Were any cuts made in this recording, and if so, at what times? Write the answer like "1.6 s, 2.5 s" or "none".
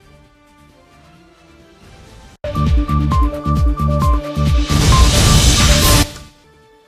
1.8 s